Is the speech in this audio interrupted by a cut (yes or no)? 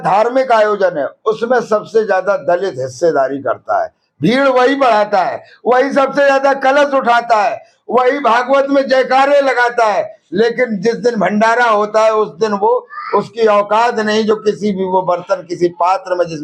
no